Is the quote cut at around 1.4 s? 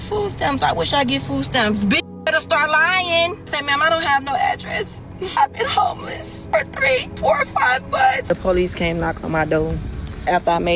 no; 5 cuts; at 3.5 s, 5.4 s, 6.3 s, 7.1 s, 8.3 s

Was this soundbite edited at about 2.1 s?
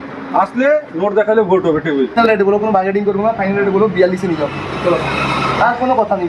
yes; 1 cut; at 2.1 s

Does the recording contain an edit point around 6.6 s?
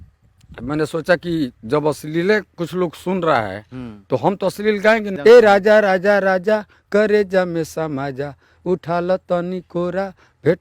no; 1 cut; at 5.1 s

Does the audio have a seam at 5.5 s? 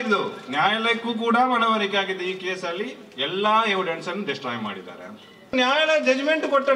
yes; 1 cut; at 5.5 s

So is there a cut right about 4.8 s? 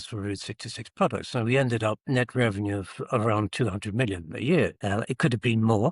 yes; 2 cuts; at 2.0 s, 4.8 s

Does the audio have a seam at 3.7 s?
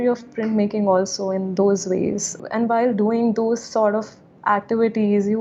no; 1 cut; at 2.4 s

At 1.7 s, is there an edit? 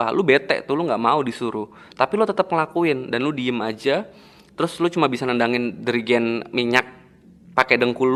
no; 0 cuts

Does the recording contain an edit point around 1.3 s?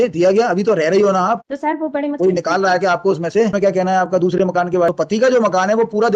no; 1 cut; at 3.5 s

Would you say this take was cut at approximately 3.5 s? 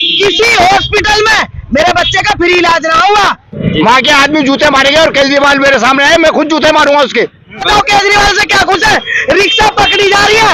yes; 2 cuts; at 3.5 s, 7.7 s

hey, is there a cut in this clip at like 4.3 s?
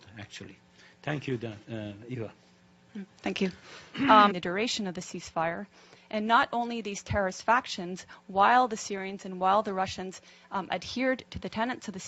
no; 0 cuts

